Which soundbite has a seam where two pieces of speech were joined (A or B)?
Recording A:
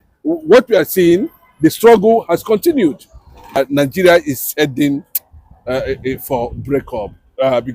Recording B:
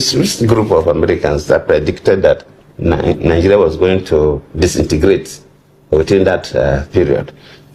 A